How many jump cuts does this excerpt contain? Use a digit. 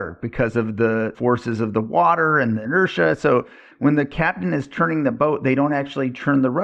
2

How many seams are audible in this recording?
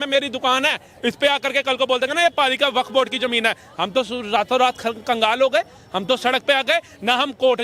0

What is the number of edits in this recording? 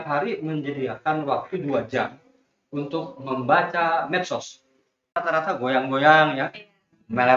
1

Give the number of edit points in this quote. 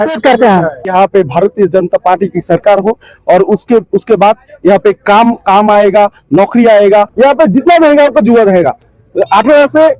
2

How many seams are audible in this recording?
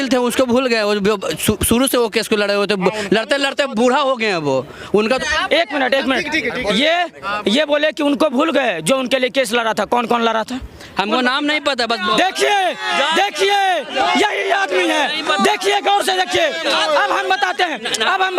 1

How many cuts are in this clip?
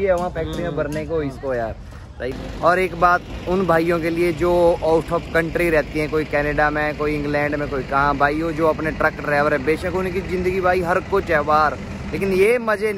1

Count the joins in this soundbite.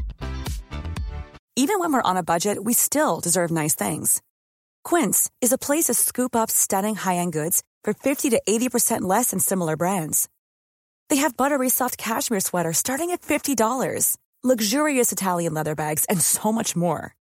1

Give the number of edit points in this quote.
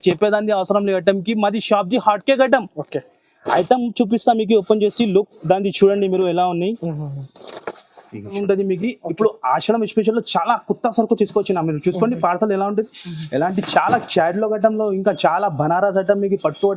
1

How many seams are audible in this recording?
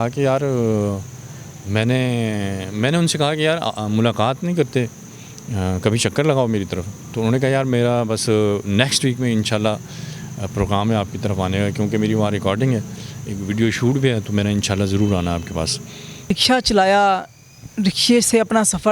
1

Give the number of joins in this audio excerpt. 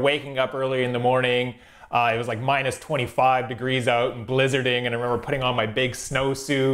0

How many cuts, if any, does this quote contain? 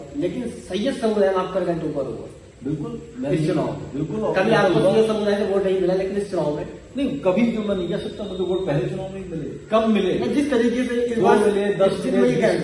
0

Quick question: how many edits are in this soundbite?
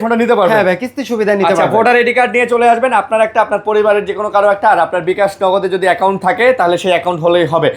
0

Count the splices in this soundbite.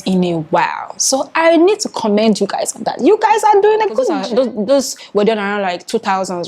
1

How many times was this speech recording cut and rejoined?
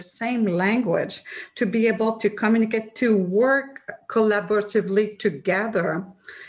0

